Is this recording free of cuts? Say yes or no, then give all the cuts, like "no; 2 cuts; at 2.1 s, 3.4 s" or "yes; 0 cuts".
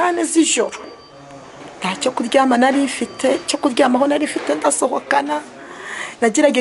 yes; 0 cuts